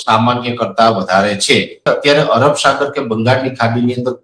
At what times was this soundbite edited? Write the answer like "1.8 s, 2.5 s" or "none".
1.8 s